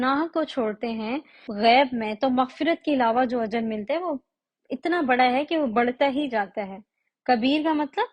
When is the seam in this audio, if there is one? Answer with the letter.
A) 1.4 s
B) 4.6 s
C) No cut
A